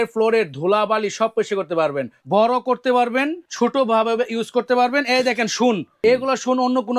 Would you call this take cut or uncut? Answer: cut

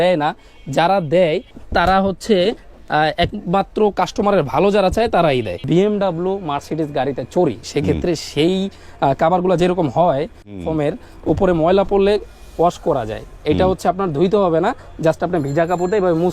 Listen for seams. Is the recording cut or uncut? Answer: cut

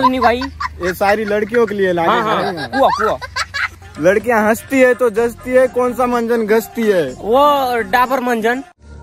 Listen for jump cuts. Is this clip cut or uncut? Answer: uncut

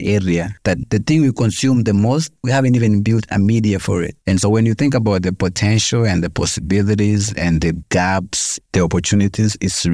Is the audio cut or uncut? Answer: cut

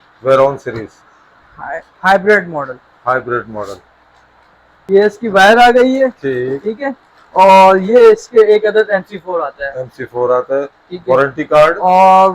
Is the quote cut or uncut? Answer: cut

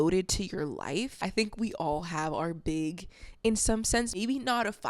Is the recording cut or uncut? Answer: cut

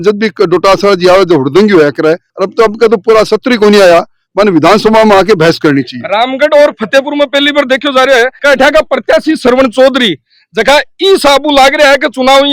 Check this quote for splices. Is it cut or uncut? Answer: uncut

